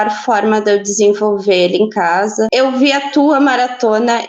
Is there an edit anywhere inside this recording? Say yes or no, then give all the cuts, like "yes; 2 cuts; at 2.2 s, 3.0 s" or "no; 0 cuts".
yes; 1 cut; at 2.5 s